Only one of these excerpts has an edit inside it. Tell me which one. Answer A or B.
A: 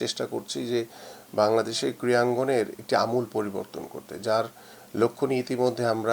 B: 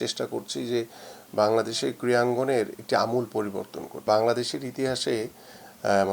B